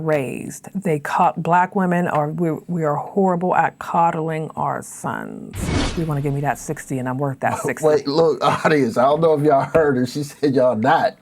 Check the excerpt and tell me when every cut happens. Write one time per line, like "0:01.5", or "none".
0:05.8